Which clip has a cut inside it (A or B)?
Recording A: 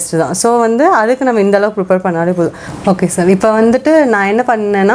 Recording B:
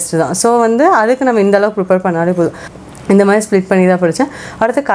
B